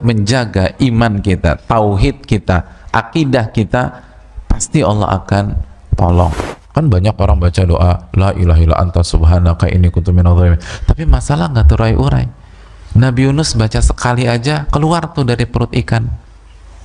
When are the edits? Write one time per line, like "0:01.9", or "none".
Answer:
0:06.5

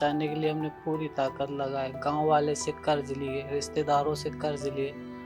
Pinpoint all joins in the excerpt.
none

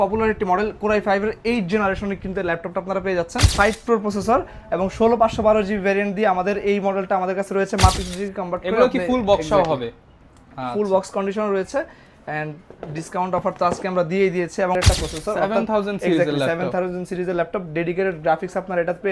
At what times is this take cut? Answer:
0:03.5
0:08.0
0:14.8

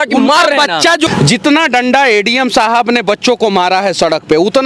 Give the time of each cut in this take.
0:01.1

